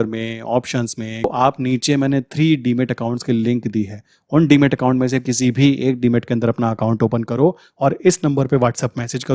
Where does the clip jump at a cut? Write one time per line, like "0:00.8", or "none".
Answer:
0:01.2